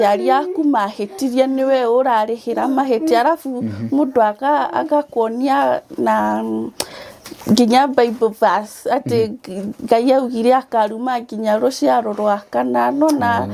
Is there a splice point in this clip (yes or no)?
no